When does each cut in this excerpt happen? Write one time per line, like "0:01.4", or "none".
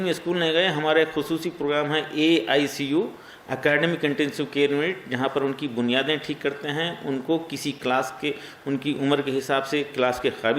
none